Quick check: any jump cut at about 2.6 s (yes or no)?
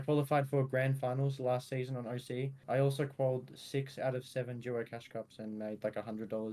yes